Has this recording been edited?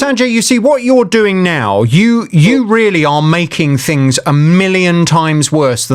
no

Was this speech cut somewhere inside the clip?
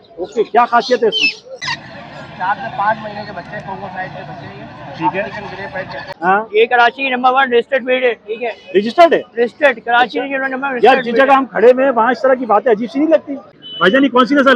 yes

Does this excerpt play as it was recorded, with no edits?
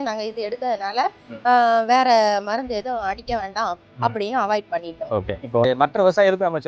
no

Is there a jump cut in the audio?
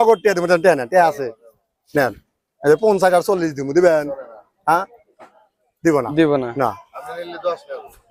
no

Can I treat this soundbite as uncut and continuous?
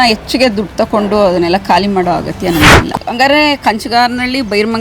no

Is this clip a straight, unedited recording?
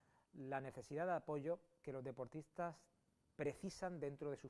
no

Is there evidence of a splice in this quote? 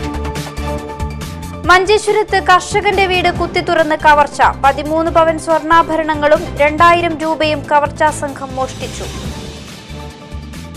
no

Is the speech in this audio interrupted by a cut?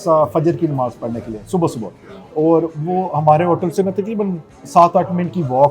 no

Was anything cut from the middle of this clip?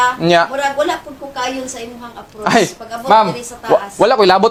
no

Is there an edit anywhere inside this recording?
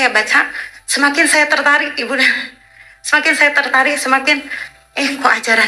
no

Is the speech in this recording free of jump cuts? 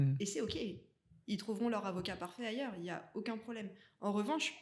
yes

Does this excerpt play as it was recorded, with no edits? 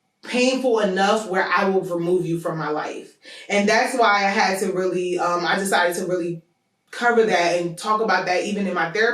yes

